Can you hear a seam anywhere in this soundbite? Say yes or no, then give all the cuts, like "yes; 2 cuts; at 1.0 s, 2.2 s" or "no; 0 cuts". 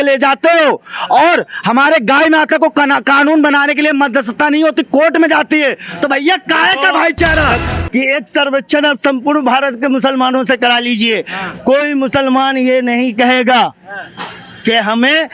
yes; 1 cut; at 7.6 s